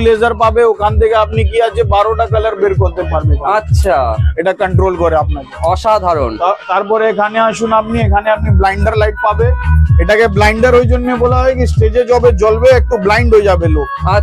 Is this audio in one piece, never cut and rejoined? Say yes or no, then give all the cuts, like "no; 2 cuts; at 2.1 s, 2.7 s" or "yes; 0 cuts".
yes; 0 cuts